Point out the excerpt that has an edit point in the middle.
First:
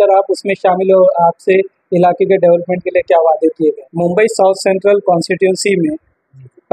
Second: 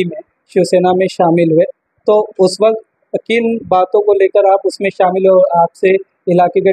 first; 1 cut; at 3.9 s

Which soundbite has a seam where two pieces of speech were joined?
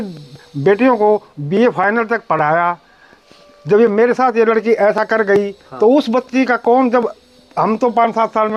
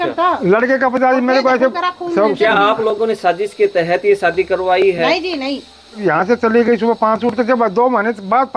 second; 1 cut; at 6.0 s

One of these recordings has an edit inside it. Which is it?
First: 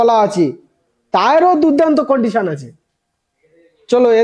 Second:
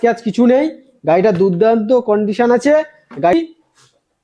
second; 1 cut; at 3.3 s

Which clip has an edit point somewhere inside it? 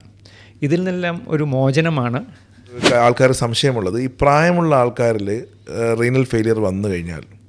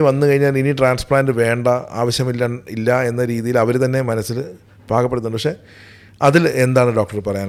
first; 1 cut; at 2.8 s

